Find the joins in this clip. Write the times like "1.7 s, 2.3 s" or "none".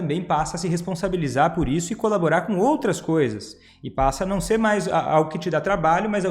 none